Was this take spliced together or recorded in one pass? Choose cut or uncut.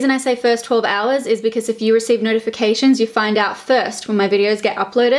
uncut